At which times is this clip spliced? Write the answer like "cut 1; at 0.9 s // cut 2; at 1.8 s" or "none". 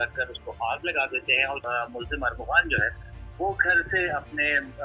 cut 1; at 1.6 s